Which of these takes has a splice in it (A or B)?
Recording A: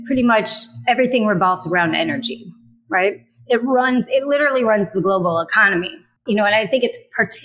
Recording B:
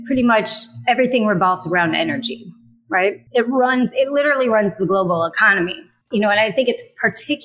B